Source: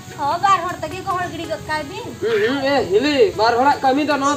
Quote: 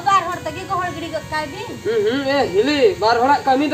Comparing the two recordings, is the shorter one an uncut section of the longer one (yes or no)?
yes